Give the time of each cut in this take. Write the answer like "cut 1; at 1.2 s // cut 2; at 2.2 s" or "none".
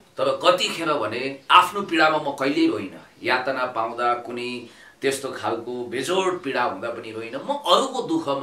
none